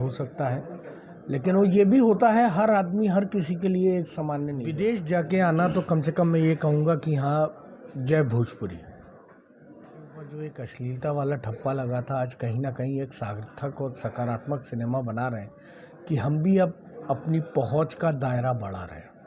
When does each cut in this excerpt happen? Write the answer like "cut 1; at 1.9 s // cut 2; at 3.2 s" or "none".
cut 1; at 4.6 s // cut 2; at 10.4 s